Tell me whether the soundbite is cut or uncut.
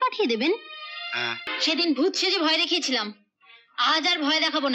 cut